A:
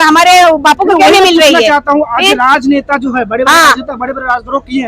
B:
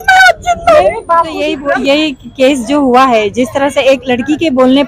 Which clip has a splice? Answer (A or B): B